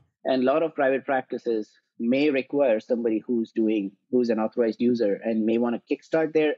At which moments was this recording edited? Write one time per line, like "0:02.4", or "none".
none